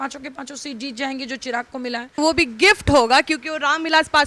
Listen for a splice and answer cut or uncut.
cut